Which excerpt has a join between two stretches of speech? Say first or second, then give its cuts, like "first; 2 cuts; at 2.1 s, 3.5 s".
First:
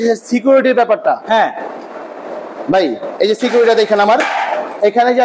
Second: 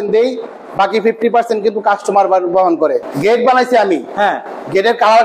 second; 1 cut; at 3.0 s